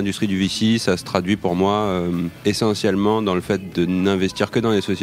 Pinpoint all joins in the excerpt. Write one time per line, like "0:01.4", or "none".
0:02.3